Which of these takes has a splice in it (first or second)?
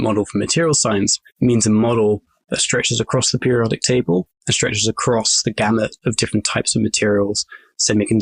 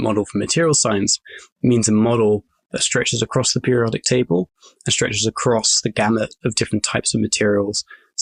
first